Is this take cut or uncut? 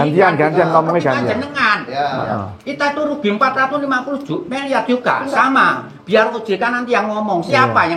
uncut